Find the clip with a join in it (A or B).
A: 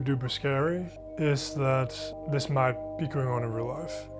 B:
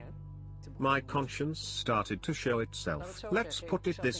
A